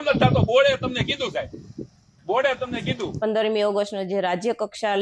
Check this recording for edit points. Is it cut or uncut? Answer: cut